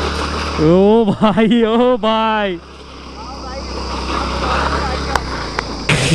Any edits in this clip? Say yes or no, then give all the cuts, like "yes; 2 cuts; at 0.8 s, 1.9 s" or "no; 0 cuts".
no; 0 cuts